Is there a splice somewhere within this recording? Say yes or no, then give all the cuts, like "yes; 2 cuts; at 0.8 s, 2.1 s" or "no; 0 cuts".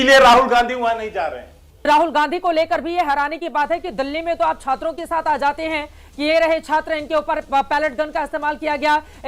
yes; 1 cut; at 1.9 s